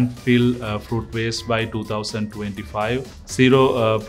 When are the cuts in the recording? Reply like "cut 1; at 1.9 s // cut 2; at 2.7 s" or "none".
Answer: none